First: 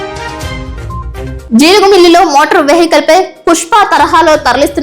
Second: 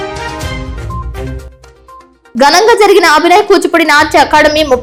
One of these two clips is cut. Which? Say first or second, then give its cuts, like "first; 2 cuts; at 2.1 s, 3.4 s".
first; 1 cut; at 1.4 s